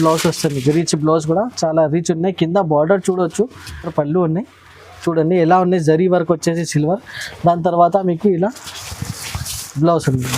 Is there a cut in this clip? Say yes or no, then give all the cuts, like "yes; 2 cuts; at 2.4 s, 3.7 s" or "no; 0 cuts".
yes; 1 cut; at 3.9 s